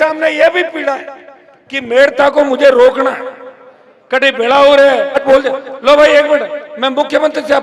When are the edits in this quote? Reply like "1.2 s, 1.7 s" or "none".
5.2 s